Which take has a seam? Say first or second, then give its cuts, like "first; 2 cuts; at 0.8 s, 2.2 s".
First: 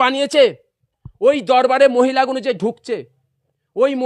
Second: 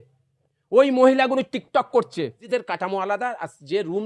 second; 1 cut; at 2.4 s